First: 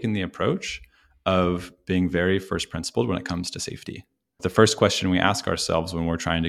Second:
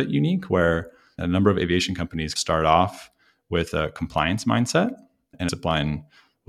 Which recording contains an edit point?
second; 1 cut; at 5.5 s

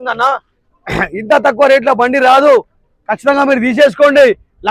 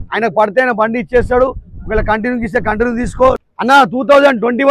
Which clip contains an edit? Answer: second; 1 cut; at 3.4 s

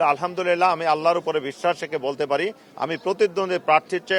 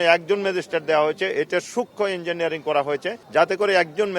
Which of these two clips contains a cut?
second; 1 cut; at 3.2 s

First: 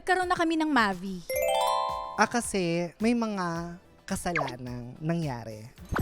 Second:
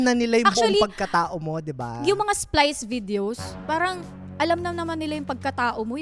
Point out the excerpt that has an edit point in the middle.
first; 1 cut; at 2.9 s

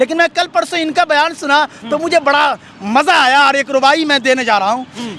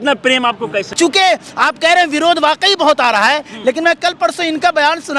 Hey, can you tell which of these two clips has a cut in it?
second; 1 cut; at 0.9 s

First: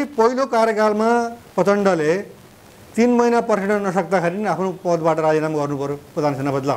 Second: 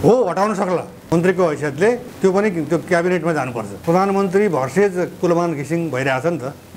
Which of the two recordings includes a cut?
second; 3 cuts; at 1.0 s, 2.1 s, 3.7 s

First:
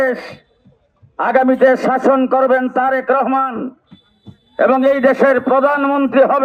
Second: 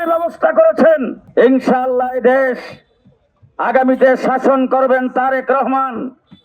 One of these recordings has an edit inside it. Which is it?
second; 1 cut; at 1.2 s

